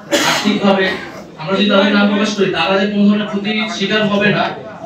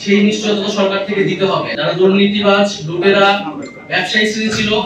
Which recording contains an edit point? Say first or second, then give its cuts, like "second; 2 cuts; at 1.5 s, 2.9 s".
second; 1 cut; at 1.7 s